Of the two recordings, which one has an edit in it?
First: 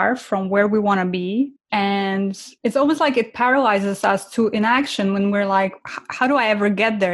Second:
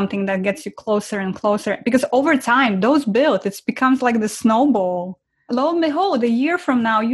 first; 2 cuts; at 1.6 s, 2.5 s

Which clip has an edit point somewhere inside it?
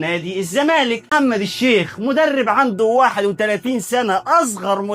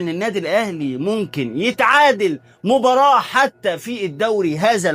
first; 1 cut; at 1.1 s

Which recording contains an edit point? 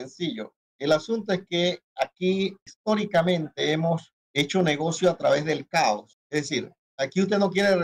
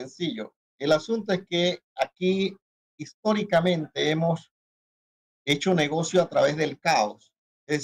first; 3 cuts; at 2.7 s, 4.2 s, 6.6 s

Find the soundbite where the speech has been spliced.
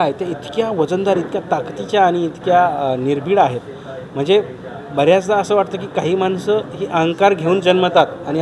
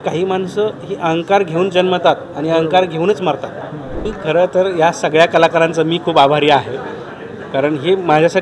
second; 1 cut; at 4.1 s

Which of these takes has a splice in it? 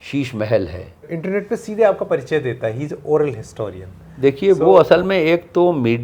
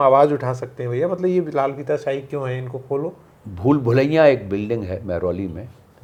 first; 1 cut; at 1.1 s

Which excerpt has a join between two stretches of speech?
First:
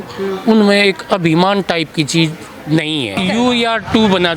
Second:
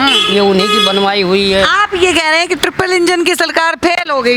first; 1 cut; at 3.2 s

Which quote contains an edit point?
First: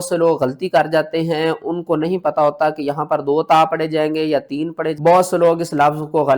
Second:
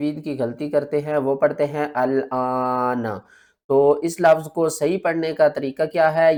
first; 1 cut; at 4.9 s

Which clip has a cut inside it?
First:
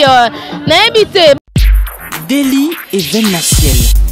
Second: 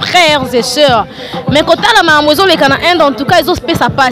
first; 1 cut; at 1.4 s

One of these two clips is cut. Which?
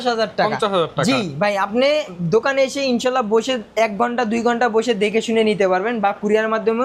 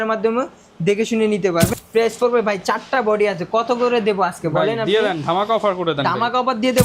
second; 1 cut; at 1.8 s

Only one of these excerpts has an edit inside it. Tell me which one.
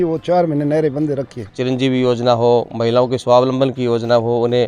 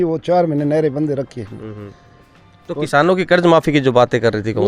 first; 1 cut; at 1.4 s

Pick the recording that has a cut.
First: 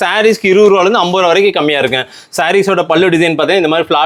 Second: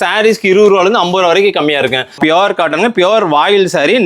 second; 1 cut; at 2.2 s

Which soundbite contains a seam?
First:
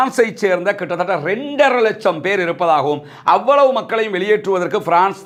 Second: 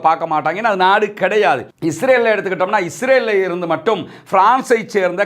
second; 1 cut; at 1.7 s

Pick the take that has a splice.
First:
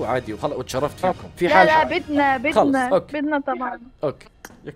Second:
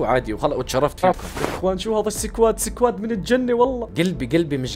second; 2 cuts; at 1.3 s, 3.8 s

